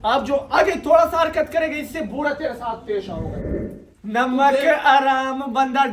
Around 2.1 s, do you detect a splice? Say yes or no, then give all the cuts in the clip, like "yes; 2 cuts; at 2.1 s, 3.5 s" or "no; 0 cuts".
no; 1 cut; at 3.4 s